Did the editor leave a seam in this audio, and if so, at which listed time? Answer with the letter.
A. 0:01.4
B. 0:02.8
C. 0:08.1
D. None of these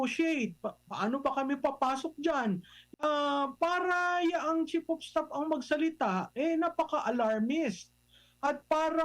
B